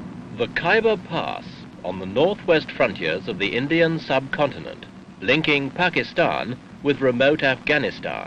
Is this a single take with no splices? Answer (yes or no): no